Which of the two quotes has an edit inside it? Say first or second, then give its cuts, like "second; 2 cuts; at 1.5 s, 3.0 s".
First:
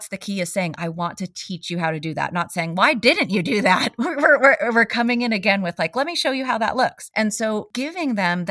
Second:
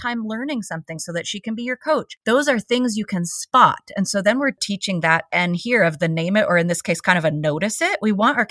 second; 2 cuts; at 2.1 s, 4.6 s